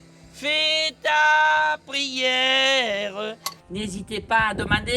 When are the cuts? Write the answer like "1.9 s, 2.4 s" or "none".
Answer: 3.5 s